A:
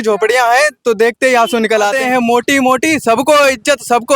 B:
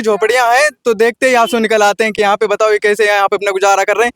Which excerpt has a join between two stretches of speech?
A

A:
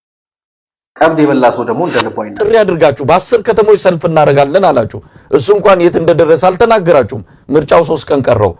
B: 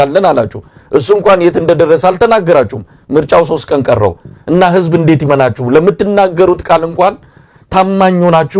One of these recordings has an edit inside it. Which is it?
A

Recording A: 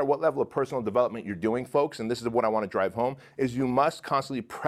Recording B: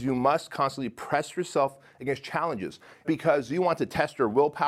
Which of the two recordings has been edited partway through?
B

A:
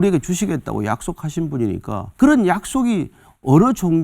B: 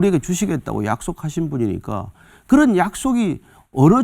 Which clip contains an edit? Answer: A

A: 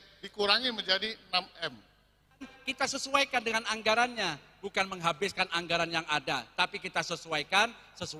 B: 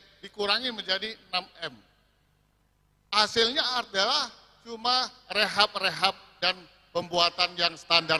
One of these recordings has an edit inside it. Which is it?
A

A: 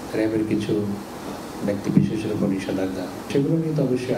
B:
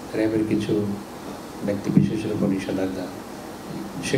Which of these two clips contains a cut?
A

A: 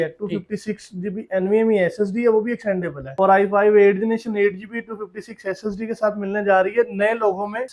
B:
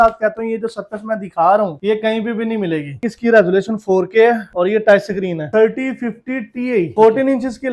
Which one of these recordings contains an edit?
B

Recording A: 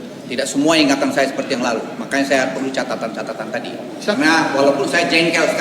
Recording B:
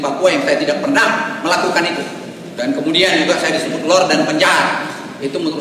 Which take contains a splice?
A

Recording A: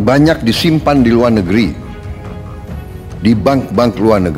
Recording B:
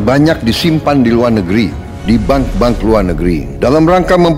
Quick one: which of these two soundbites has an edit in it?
B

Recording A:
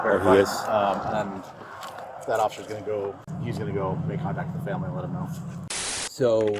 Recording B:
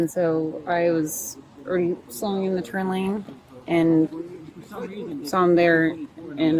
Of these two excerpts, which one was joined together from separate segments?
A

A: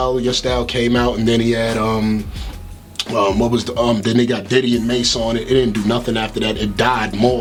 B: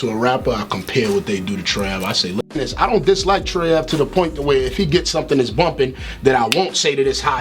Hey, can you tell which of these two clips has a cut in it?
B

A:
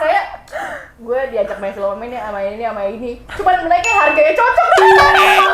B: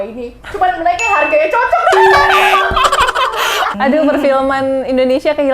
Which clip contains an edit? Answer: B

